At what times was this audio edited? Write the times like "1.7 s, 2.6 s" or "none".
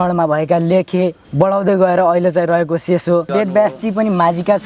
1.2 s, 3.3 s